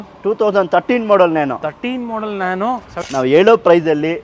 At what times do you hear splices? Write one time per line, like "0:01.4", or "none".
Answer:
0:02.9